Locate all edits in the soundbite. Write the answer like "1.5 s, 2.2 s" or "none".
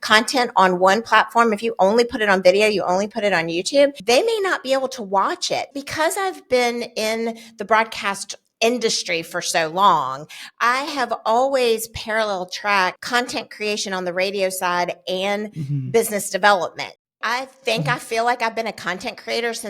4.0 s, 5.7 s, 17.1 s